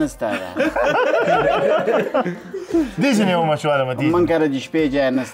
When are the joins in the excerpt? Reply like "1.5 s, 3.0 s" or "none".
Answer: none